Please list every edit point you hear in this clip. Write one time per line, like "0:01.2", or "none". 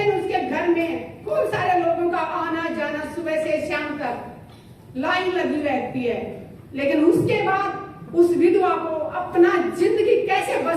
none